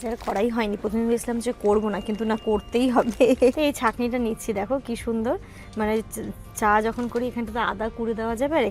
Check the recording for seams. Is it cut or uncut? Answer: cut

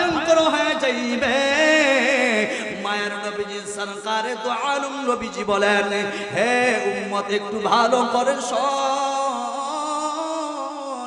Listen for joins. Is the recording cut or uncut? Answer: uncut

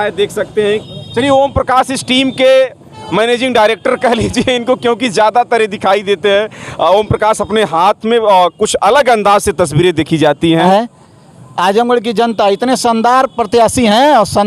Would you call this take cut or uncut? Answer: cut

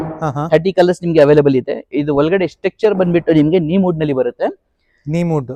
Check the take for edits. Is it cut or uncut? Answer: uncut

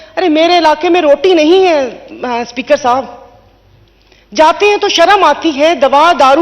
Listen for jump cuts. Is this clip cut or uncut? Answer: uncut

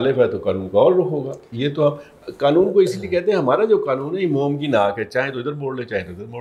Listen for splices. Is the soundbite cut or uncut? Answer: uncut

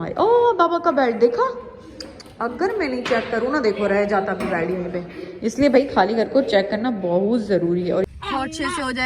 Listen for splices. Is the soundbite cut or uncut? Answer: cut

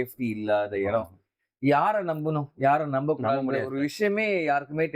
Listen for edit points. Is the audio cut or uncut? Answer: uncut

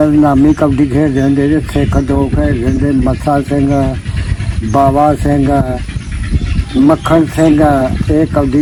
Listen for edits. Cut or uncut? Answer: uncut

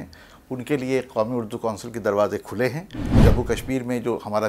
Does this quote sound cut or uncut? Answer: cut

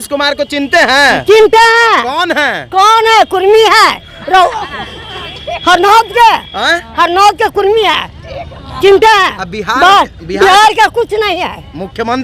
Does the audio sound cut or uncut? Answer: uncut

